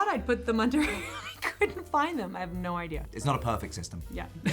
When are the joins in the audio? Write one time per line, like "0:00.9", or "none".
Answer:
0:03.1